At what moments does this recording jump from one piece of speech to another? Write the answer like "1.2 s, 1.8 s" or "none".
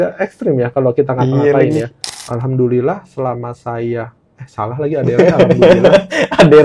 2.0 s